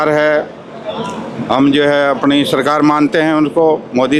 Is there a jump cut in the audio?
no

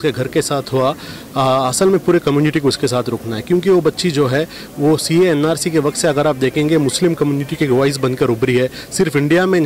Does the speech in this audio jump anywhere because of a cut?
no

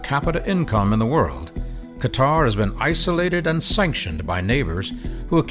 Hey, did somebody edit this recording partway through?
no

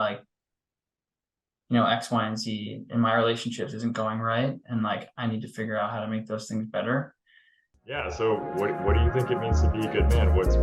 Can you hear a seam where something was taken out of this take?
yes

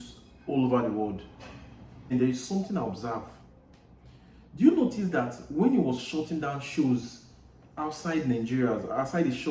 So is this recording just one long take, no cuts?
no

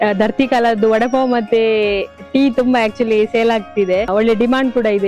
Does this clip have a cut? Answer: yes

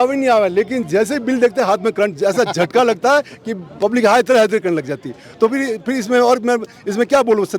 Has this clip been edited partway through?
no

